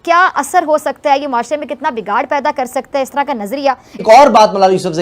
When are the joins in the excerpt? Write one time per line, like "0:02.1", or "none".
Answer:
0:03.9